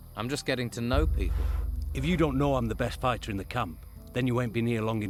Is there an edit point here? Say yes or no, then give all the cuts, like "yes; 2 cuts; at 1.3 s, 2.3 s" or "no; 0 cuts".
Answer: no; 0 cuts